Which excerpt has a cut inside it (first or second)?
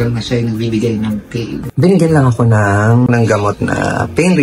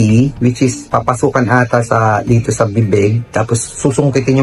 first